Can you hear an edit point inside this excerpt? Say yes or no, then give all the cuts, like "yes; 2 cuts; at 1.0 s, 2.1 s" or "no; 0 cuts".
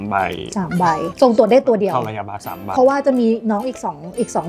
yes; 2 cuts; at 1.1 s, 2.5 s